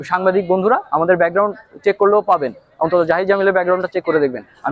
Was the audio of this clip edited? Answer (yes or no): no